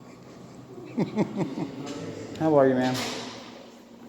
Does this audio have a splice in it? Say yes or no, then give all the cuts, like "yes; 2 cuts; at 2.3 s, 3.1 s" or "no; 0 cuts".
yes; 1 cut; at 1.8 s